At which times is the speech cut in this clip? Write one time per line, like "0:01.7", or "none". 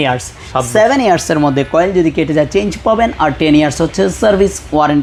none

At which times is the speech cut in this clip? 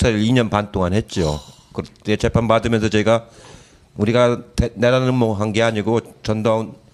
0:04.4

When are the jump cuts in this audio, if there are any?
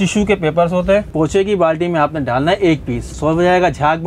0:01.1
0:03.1

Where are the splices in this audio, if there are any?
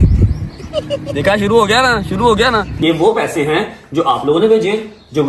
0:01.0
0:02.7

